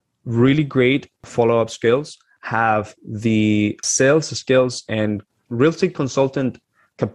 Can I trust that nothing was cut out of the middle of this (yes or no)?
no